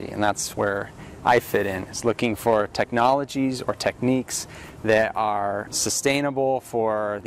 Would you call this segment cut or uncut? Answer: cut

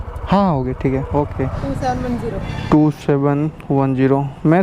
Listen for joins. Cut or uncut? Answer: cut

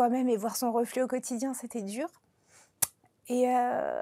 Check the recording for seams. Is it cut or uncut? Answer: uncut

